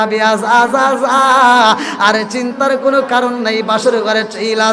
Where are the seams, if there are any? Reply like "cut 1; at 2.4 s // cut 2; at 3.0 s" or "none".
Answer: none

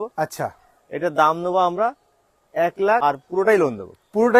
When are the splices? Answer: cut 1; at 3.0 s

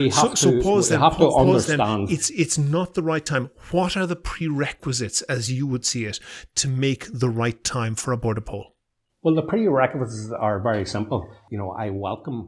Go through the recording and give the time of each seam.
cut 1; at 11.4 s

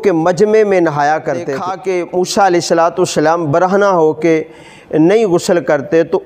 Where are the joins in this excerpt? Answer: cut 1; at 1.7 s

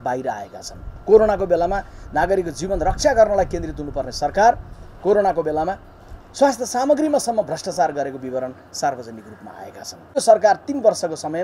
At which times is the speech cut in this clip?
cut 1; at 10.2 s

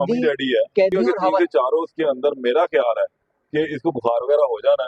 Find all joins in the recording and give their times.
cut 1; at 1.2 s

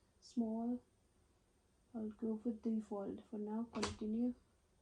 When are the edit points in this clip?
none

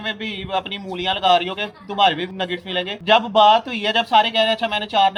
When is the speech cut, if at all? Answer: none

